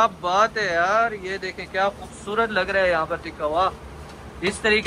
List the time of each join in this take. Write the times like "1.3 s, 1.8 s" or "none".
none

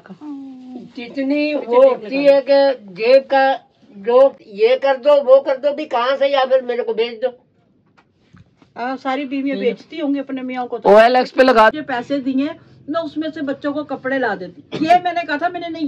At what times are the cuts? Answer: 4.4 s, 11.7 s

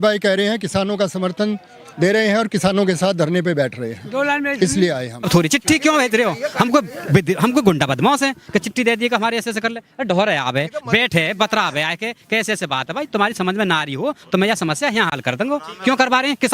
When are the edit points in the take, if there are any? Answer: 5.1 s

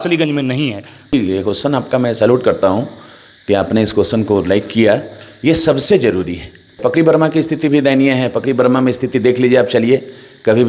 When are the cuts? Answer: 1.1 s, 6.8 s

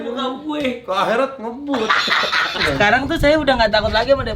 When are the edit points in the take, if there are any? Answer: 2.7 s

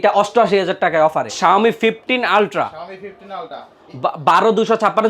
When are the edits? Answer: 1.3 s

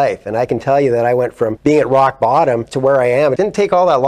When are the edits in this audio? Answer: 1.6 s, 3.0 s

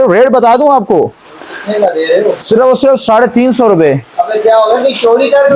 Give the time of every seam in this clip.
none

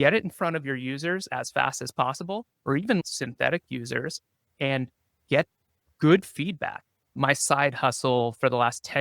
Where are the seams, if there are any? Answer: 2.5 s, 7.0 s

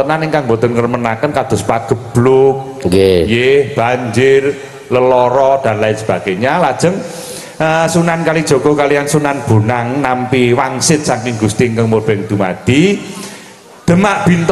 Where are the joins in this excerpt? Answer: none

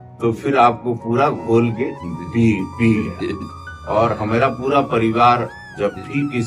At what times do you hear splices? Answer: none

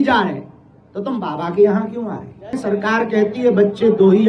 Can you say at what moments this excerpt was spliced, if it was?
2.5 s

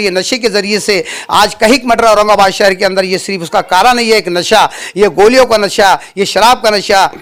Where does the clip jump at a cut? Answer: none

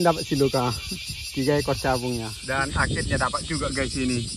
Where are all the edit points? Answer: 2.3 s

